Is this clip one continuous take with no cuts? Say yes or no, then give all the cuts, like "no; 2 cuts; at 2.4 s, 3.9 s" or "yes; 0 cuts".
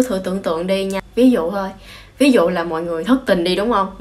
no; 1 cut; at 1.0 s